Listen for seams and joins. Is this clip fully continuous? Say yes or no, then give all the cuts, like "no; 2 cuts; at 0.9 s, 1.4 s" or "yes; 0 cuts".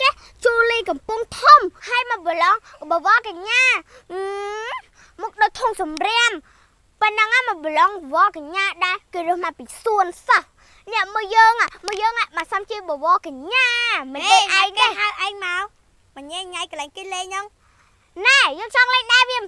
no; 1 cut; at 1.8 s